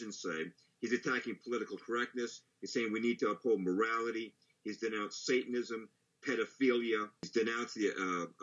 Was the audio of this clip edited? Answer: yes; 1 cut; at 7.3 s

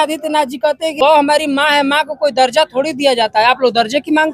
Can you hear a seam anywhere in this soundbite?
yes; 1 cut; at 0.9 s

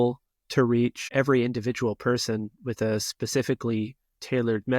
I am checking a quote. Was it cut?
yes; 1 cut; at 1.0 s

